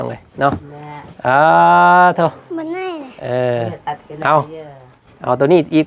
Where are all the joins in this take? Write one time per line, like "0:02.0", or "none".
none